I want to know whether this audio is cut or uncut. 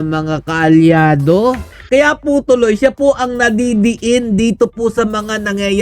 uncut